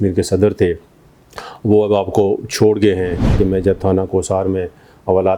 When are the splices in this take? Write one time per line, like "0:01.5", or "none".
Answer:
0:03.3